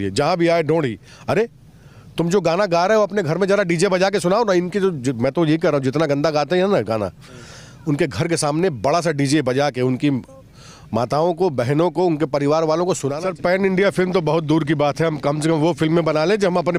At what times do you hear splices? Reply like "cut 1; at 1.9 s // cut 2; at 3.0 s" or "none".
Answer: cut 1; at 13.1 s